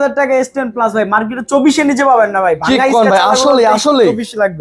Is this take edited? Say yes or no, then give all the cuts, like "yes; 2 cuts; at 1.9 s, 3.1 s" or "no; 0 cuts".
no; 0 cuts